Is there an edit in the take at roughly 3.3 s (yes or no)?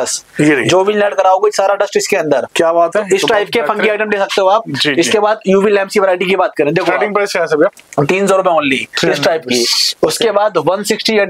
no